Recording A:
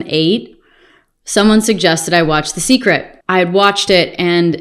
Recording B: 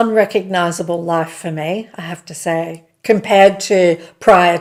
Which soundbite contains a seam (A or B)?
A